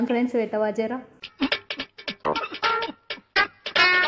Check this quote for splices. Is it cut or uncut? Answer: cut